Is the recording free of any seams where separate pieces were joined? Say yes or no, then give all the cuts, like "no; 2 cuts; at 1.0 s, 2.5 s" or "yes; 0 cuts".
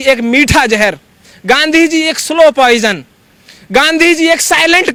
yes; 0 cuts